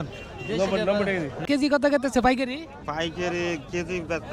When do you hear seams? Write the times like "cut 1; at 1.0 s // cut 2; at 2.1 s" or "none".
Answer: cut 1; at 1.4 s